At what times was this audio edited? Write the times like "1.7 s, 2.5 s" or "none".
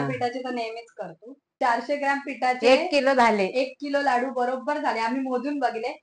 1.5 s